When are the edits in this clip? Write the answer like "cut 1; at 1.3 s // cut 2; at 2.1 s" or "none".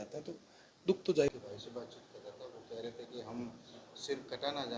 cut 1; at 1.3 s